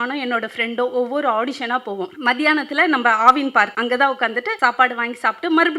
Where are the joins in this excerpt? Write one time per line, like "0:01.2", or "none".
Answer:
0:02.1
0:03.7
0:04.5